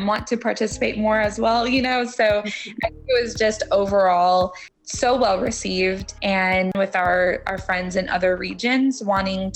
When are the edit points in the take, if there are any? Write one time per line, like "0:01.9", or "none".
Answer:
0:06.7